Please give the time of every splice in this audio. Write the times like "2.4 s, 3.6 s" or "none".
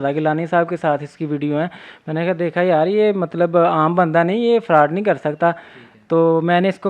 none